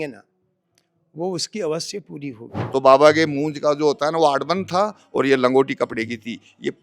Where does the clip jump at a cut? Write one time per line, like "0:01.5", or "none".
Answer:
0:02.6